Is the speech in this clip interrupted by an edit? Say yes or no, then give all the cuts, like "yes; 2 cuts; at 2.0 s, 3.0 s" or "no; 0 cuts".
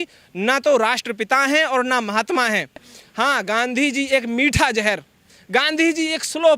no; 0 cuts